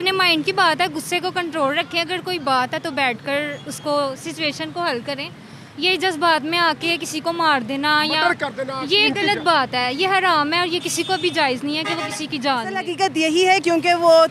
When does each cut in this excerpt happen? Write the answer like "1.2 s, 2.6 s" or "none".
12.8 s